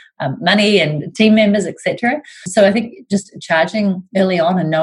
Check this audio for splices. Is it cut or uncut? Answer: cut